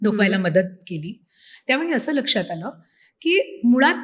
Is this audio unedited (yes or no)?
yes